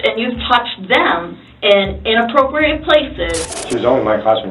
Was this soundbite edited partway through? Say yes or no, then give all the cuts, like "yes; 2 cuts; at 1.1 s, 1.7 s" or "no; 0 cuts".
yes; 1 cut; at 3.5 s